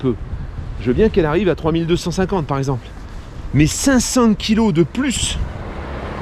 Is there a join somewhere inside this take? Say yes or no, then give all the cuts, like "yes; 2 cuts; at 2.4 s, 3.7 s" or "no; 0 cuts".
no; 0 cuts